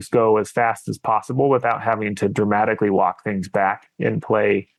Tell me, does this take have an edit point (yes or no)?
no